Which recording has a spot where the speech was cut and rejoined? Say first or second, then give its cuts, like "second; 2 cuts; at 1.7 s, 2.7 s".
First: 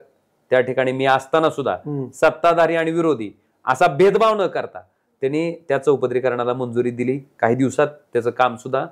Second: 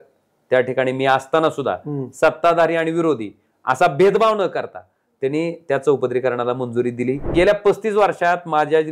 second; 1 cut; at 7.3 s